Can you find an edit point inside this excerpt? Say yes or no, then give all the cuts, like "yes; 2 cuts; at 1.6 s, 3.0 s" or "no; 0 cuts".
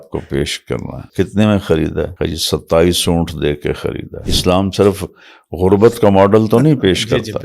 yes; 3 cuts; at 1.0 s, 2.1 s, 4.2 s